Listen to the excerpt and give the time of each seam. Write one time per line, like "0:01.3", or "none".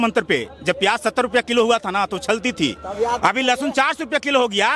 none

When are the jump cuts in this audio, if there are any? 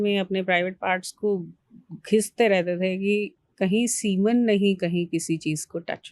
none

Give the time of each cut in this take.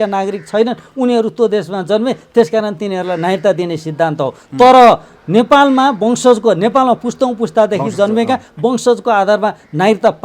none

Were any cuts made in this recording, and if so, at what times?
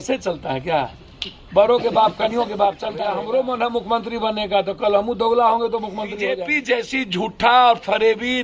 0:03.0
0:06.4

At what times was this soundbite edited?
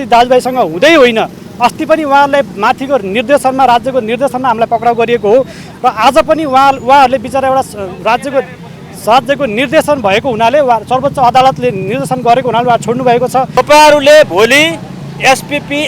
0:13.5

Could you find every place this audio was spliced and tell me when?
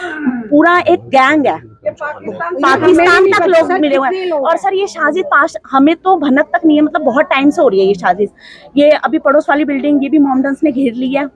none

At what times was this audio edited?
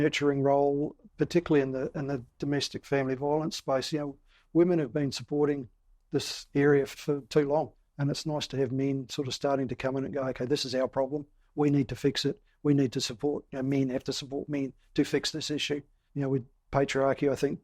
0:01.0
0:07.0
0:07.8
0:16.0

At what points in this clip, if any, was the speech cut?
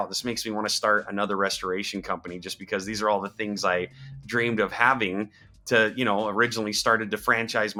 none

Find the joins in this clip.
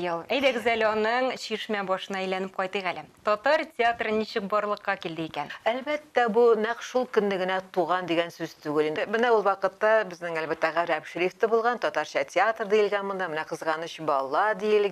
0:05.5
0:09.0

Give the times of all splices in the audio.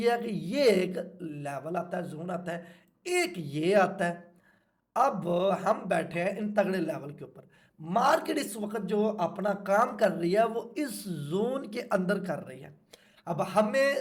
none

